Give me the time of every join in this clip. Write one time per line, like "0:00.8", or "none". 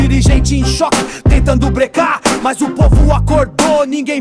none